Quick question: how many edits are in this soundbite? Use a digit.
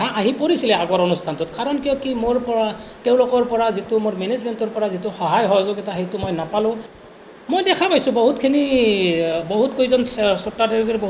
1